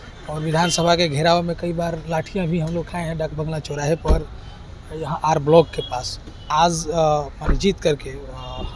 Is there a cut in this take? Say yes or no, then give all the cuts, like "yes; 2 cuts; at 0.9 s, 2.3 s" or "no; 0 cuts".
yes; 1 cut; at 6.5 s